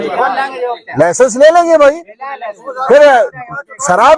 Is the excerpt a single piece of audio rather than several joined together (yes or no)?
yes